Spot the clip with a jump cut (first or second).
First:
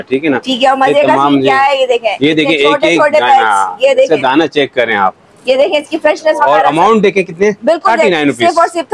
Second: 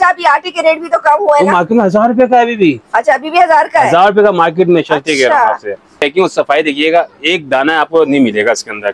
second